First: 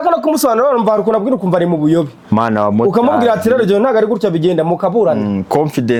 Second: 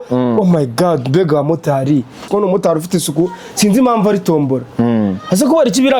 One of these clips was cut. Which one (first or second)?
second